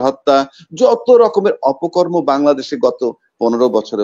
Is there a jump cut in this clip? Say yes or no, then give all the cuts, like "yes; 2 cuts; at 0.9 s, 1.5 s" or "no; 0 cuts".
no; 0 cuts